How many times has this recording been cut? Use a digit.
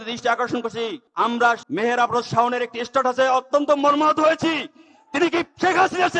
1